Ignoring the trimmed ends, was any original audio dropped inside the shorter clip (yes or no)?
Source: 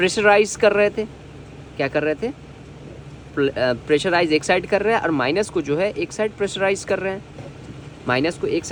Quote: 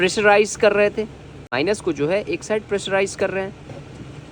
yes